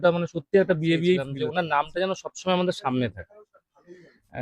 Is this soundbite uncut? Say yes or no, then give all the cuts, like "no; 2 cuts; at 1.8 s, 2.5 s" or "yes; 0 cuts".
no; 1 cut; at 1.3 s